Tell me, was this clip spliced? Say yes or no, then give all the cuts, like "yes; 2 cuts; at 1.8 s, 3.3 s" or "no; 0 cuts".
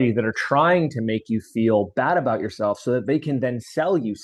no; 0 cuts